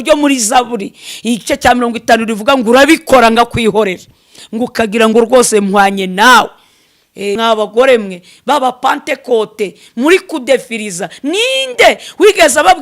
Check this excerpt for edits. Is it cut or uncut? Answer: cut